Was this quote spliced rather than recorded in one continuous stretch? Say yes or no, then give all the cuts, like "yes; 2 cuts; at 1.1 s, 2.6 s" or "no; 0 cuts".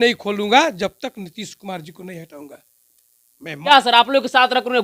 yes; 1 cut; at 3.7 s